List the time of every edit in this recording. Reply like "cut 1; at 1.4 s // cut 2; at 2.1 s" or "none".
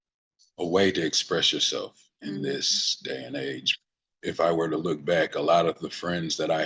cut 1; at 3.8 s